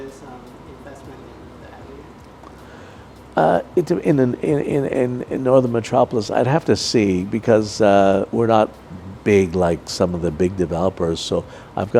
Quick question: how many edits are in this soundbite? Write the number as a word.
zero